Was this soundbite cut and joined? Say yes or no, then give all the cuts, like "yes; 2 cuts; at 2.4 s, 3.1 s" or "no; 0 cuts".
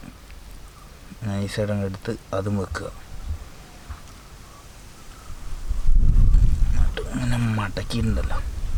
no; 0 cuts